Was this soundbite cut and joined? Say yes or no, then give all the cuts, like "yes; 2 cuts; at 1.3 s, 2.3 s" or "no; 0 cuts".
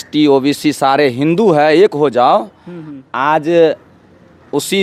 no; 0 cuts